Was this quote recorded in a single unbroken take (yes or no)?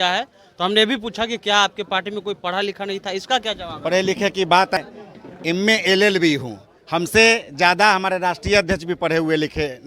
no